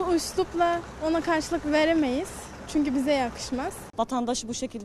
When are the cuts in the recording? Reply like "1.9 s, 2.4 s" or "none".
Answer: 3.8 s